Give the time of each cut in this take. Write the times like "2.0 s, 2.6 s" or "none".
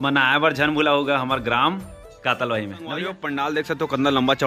3.0 s